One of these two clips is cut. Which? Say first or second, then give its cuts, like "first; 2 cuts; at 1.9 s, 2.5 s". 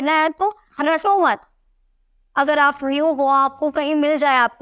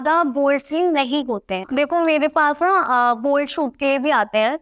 second; 1 cut; at 1.7 s